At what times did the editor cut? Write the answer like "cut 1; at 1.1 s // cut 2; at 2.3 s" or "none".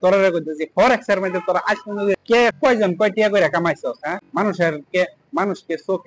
cut 1; at 2.3 s // cut 2; at 4.2 s